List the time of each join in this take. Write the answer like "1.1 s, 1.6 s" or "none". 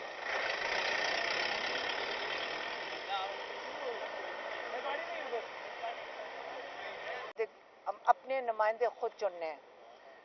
3.0 s